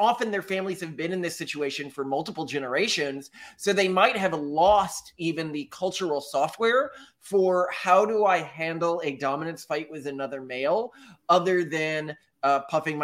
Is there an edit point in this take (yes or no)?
no